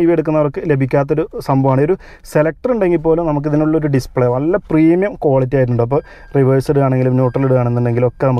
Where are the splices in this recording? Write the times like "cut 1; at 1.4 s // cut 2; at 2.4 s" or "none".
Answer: none